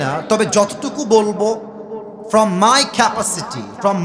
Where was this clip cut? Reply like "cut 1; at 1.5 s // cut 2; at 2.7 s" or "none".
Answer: none